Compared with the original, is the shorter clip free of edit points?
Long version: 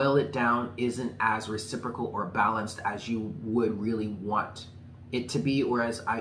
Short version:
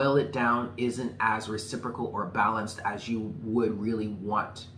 yes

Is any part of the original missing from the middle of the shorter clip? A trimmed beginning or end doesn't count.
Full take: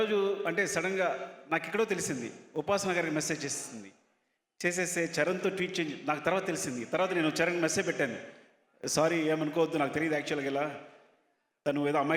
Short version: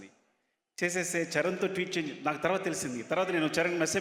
no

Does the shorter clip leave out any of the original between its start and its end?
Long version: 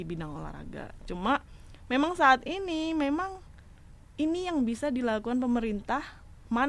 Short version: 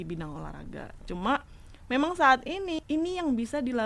yes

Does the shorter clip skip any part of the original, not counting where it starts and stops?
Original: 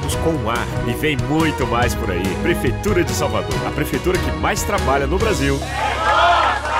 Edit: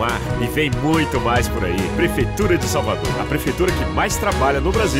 no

